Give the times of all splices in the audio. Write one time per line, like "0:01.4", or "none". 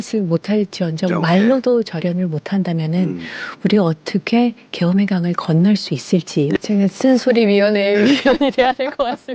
0:06.6